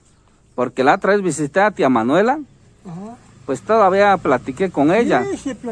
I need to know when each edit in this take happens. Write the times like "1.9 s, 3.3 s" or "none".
none